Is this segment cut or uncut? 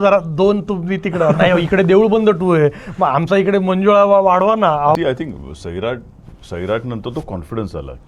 cut